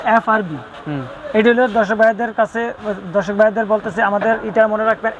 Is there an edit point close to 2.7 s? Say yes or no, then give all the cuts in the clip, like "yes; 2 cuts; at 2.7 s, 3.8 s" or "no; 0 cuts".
no; 0 cuts